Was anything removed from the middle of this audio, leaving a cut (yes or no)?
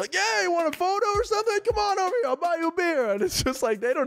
no